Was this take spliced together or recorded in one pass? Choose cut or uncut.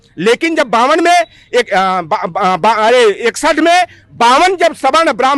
uncut